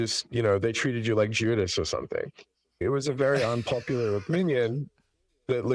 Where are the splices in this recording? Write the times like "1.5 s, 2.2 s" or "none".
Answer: 2.8 s